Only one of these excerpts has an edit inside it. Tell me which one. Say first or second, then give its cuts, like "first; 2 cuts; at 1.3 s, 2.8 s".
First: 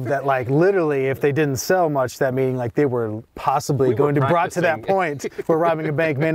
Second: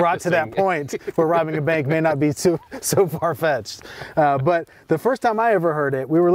first; 1 cut; at 3.2 s